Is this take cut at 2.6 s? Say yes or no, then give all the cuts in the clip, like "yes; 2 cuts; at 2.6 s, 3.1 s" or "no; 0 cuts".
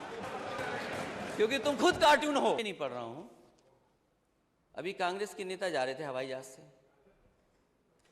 yes; 1 cut; at 2.6 s